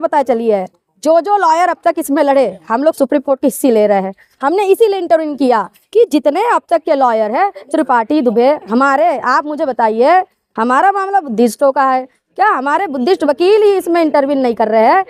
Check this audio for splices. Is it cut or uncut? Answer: uncut